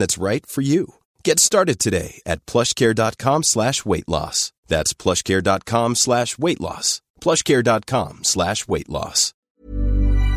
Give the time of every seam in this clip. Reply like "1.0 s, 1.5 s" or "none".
9.4 s